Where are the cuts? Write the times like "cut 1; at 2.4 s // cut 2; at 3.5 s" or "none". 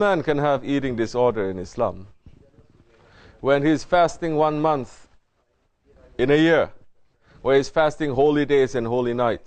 none